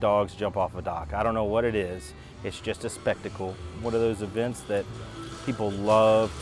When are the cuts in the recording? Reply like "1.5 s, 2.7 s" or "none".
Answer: 3.7 s